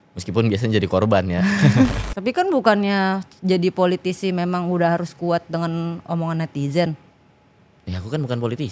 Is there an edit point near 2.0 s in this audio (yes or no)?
yes